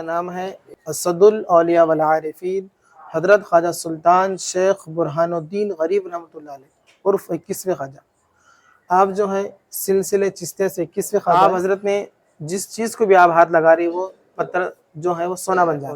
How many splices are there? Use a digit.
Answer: 1